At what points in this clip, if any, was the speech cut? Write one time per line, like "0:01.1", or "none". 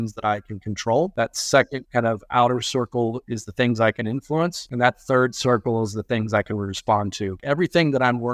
0:01.1
0:04.6
0:07.4